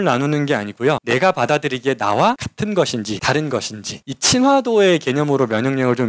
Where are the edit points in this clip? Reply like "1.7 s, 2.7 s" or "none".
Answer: 1.0 s, 2.8 s